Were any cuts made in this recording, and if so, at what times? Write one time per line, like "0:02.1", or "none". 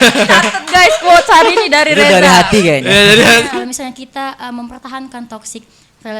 0:03.5